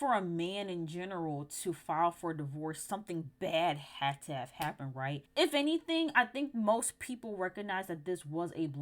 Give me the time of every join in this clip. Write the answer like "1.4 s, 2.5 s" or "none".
5.3 s